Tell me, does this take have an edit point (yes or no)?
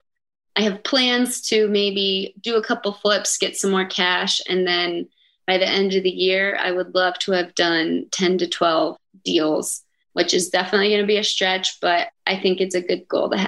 yes